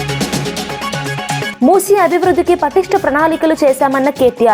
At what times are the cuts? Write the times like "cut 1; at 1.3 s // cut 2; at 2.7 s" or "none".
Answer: none

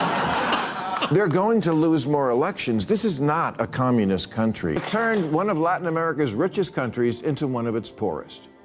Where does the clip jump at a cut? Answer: cut 1; at 4.8 s

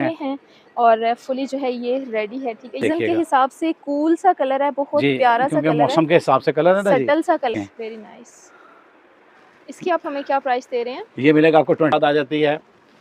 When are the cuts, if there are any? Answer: cut 1; at 2.8 s // cut 2; at 7.5 s // cut 3; at 11.9 s

